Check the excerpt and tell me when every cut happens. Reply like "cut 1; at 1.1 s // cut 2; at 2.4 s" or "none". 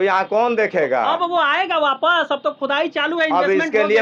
none